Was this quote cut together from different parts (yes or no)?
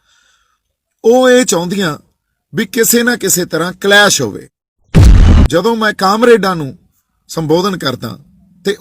yes